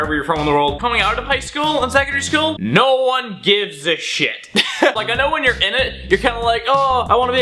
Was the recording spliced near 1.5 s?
yes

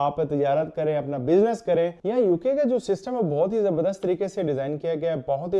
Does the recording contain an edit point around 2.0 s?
yes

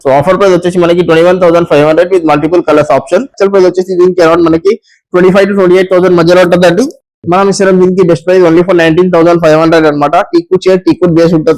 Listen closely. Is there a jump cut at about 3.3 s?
yes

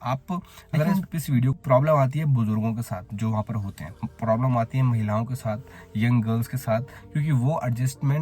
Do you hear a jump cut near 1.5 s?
yes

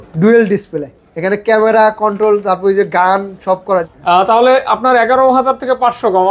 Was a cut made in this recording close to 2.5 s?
no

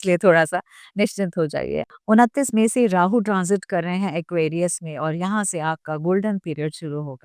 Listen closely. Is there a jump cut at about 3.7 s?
no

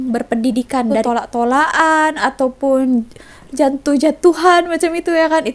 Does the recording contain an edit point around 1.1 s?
yes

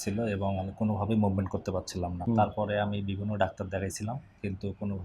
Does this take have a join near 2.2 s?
yes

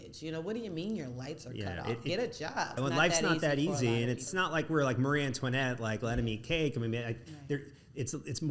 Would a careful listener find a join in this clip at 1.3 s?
no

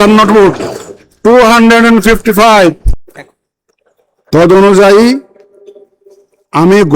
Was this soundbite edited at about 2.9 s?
yes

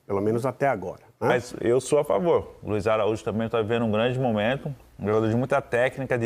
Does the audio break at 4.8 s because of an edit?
no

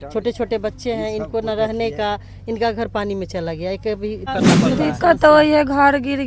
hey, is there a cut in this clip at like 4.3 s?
yes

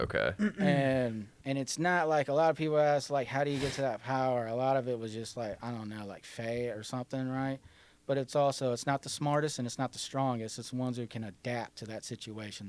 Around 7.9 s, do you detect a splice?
no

